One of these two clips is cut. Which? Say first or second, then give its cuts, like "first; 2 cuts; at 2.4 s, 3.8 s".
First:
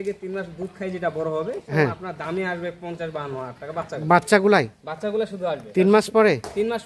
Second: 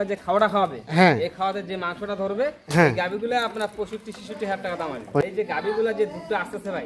second; 1 cut; at 5.3 s